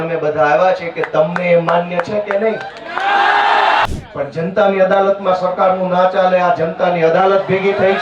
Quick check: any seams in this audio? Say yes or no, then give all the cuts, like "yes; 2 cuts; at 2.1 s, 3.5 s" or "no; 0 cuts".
yes; 1 cut; at 3.8 s